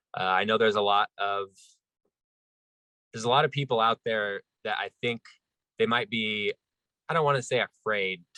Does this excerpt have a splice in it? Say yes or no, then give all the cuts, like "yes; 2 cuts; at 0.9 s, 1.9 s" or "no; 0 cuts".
no; 0 cuts